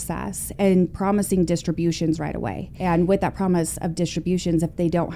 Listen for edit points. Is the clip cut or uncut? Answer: cut